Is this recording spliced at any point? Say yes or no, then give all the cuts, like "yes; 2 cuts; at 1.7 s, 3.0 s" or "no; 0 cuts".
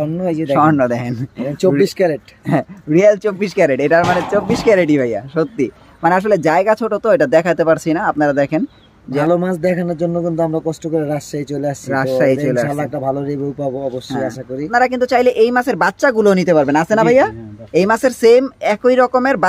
yes; 2 cuts; at 9.2 s, 14.7 s